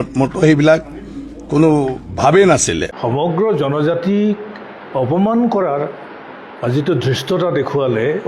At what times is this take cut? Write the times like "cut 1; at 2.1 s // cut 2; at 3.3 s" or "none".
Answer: cut 1; at 3.3 s